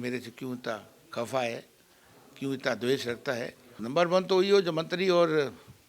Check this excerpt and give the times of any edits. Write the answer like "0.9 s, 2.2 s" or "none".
3.7 s